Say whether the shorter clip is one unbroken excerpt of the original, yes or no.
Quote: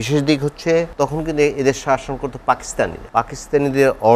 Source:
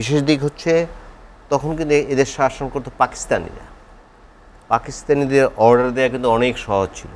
no